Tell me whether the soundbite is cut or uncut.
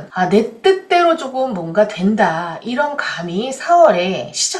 uncut